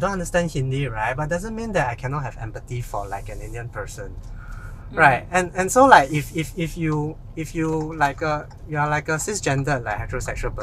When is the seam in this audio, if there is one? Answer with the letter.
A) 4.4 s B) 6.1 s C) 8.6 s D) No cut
D